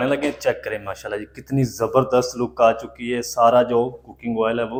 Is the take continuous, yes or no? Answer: yes